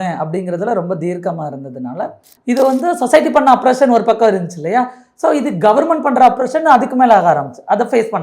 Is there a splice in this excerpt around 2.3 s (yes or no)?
yes